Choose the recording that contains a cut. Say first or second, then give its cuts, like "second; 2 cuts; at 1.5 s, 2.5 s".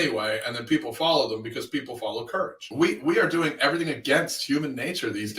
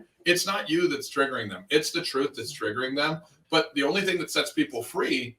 first; 1 cut; at 2.6 s